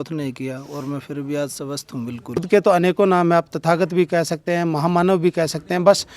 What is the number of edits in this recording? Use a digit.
1